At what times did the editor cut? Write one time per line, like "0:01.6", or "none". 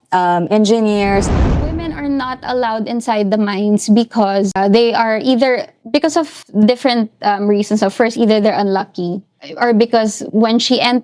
0:01.3
0:04.5
0:09.4